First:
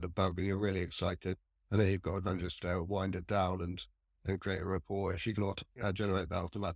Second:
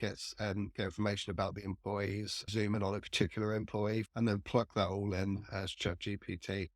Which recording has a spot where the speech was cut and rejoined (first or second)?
second